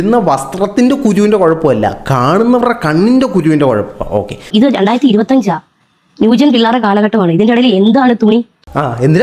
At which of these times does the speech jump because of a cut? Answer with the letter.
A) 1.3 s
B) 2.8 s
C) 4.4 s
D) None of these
C